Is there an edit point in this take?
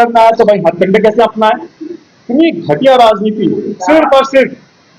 no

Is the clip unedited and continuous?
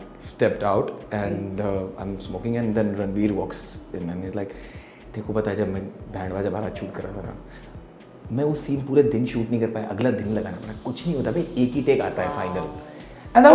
yes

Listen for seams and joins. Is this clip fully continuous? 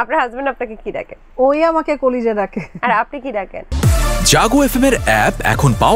no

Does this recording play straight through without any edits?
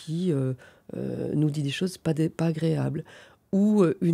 yes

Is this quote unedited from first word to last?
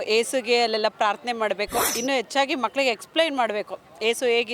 no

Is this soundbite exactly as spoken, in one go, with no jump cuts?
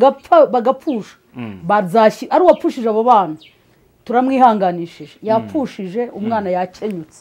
yes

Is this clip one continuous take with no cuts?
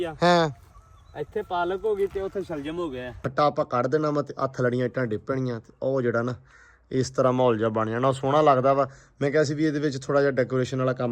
no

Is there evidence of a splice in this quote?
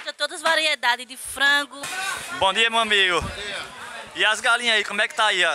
yes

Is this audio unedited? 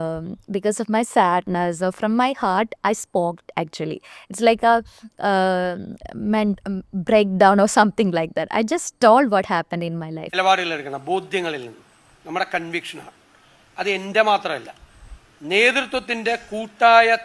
no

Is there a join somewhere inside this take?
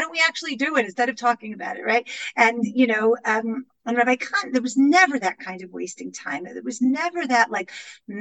no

